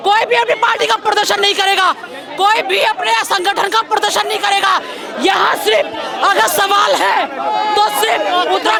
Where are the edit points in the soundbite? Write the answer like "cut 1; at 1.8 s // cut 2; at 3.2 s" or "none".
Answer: none